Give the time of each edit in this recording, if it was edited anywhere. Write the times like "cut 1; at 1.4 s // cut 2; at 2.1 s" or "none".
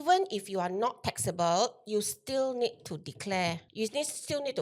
cut 1; at 3.7 s